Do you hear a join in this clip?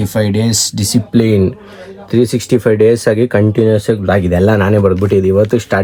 no; 0 cuts

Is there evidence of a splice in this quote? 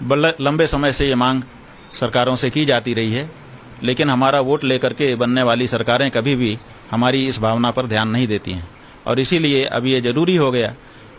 no; 0 cuts

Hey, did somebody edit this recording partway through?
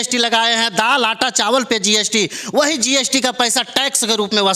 no; 0 cuts

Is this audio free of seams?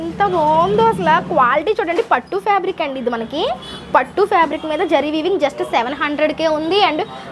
yes; 0 cuts

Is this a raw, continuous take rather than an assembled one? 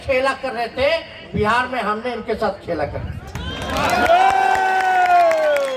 yes; 0 cuts

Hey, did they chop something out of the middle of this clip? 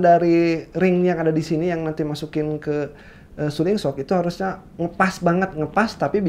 no; 0 cuts

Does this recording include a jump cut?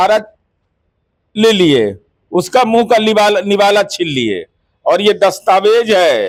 no; 0 cuts

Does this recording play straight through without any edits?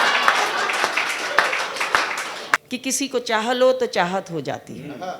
no; 1 cut; at 2.6 s

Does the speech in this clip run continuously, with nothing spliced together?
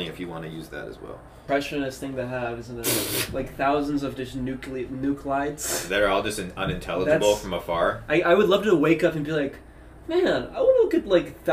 no; 1 cut; at 1.4 s

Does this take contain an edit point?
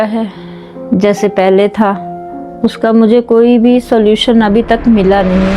no; 0 cuts

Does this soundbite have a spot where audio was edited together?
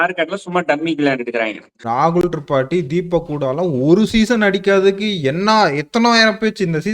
yes; 1 cut; at 1.8 s

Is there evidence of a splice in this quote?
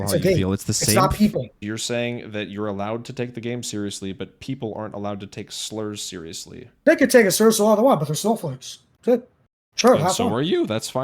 yes; 2 cuts; at 1.6 s, 6.8 s

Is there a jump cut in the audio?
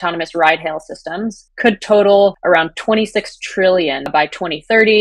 yes; 2 cuts; at 2.4 s, 4.1 s

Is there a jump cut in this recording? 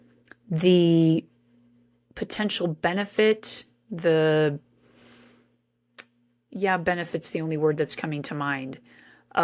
no; 0 cuts

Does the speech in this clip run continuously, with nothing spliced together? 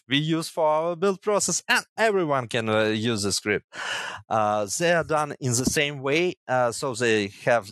yes; 0 cuts

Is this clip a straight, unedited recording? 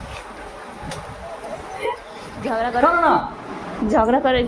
no; 1 cut; at 2.5 s

